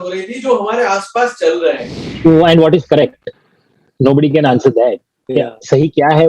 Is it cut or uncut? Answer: cut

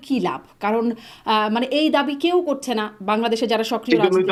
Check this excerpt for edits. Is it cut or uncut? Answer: uncut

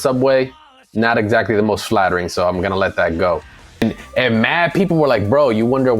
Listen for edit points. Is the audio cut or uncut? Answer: cut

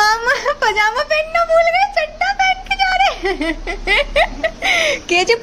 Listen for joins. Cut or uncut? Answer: uncut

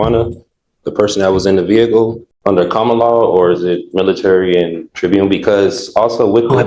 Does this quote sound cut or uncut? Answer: cut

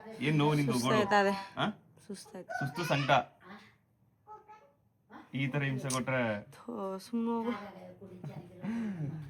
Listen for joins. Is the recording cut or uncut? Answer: uncut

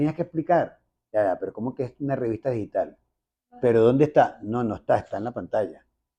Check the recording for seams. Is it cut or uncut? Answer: uncut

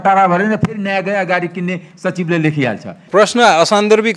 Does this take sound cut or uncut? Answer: cut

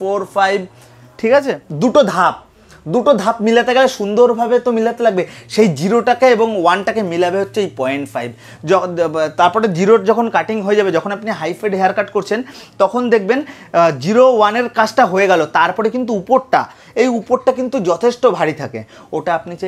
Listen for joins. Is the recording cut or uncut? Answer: cut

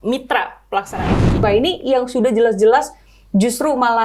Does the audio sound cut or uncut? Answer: cut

